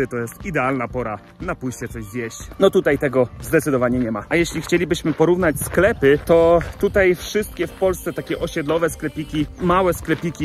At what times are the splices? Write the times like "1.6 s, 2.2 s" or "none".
none